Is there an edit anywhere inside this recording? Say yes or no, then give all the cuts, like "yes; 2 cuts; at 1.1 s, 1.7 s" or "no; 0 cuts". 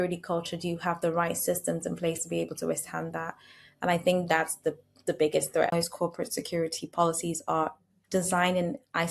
yes; 1 cut; at 5.7 s